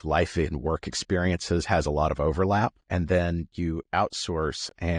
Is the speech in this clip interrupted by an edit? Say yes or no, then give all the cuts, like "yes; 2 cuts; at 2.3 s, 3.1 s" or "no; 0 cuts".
yes; 1 cut; at 2.8 s